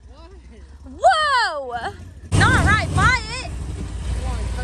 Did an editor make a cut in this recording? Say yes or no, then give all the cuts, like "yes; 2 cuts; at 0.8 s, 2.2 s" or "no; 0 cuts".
yes; 1 cut; at 2.3 s